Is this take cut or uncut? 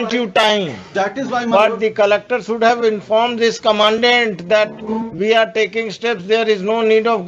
uncut